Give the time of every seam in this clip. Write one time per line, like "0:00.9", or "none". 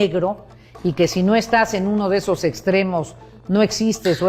none